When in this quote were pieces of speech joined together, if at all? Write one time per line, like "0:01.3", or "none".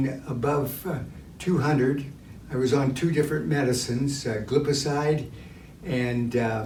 none